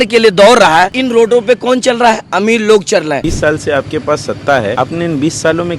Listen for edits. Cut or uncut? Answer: cut